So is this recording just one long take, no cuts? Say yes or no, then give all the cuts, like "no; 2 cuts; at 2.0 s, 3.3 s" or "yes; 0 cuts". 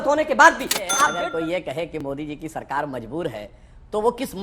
no; 1 cut; at 1.1 s